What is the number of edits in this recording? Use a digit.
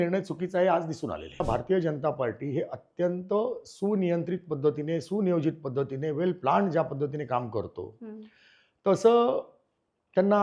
1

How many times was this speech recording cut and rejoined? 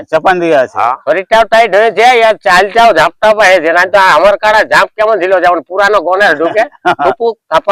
1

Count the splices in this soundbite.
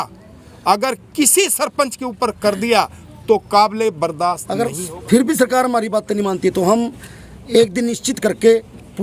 1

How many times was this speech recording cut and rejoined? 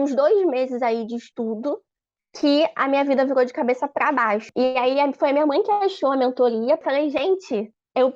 2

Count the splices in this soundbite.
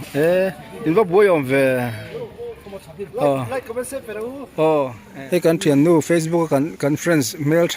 1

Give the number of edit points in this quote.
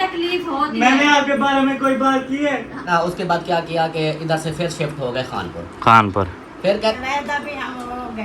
2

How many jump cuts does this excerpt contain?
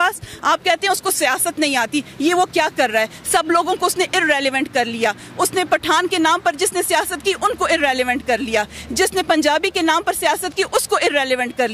0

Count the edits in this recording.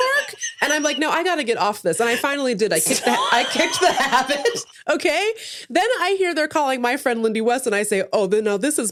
0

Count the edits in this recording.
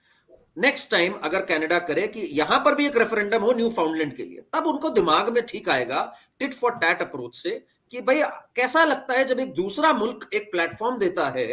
0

